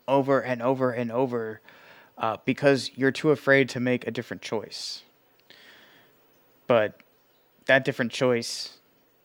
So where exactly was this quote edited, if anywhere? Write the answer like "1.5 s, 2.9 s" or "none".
none